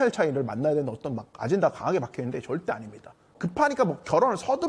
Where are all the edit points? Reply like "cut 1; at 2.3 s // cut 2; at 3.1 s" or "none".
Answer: cut 1; at 3.4 s